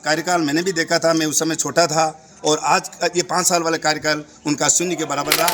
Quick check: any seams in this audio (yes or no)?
no